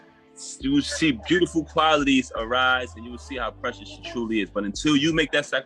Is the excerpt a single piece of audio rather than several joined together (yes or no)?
no